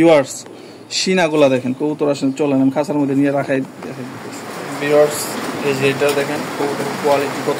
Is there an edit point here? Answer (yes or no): yes